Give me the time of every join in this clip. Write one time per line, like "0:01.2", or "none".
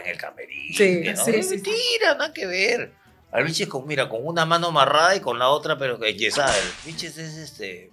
0:06.7

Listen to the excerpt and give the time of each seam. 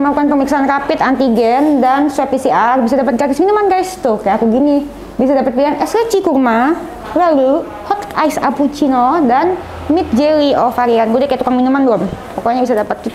none

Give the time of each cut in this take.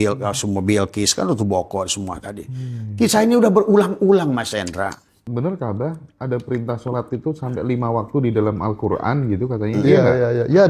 0:05.2

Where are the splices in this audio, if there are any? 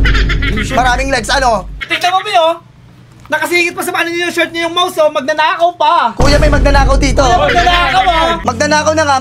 0:01.8
0:08.4

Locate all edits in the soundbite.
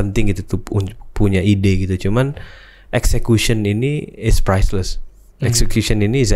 none

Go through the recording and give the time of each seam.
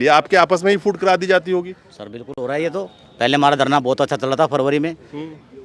none

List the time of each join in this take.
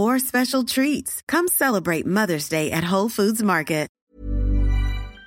0:03.9

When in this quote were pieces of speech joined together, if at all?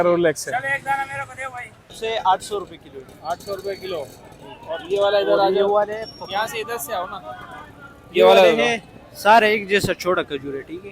0:01.9

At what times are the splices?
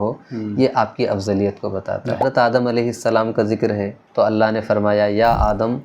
0:02.2
0:04.0

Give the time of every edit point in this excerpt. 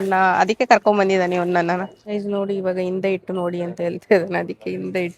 0:02.0

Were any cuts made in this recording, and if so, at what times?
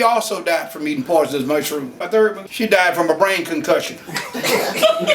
0:02.0

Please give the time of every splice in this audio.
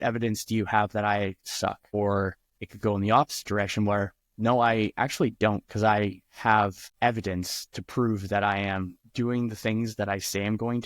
0:01.9
0:06.8

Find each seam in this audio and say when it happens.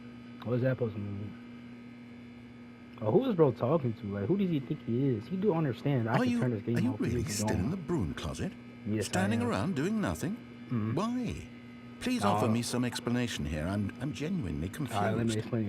none

